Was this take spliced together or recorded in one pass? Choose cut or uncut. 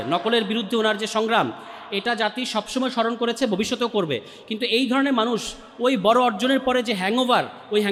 uncut